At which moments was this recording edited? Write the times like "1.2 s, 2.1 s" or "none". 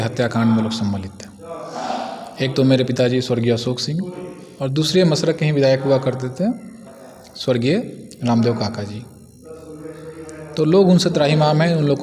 none